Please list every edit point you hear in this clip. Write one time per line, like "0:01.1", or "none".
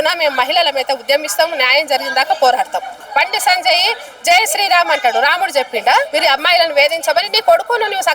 0:03.0
0:06.1